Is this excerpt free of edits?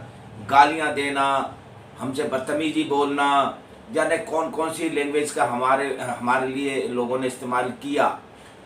yes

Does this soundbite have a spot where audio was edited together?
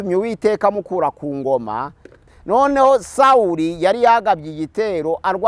yes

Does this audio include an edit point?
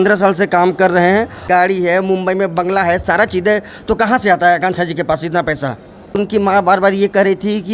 yes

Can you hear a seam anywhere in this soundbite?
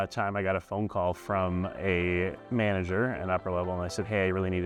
no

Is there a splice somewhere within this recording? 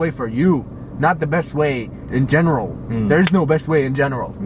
yes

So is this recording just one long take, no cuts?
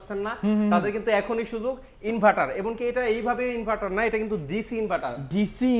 yes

